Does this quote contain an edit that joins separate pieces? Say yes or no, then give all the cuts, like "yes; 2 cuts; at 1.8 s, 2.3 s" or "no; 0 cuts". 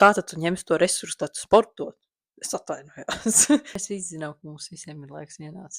yes; 1 cut; at 3.8 s